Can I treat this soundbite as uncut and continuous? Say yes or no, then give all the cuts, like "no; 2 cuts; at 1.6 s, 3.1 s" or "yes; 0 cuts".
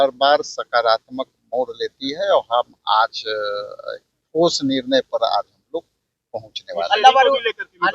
yes; 0 cuts